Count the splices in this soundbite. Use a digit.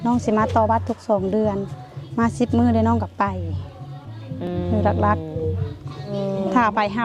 1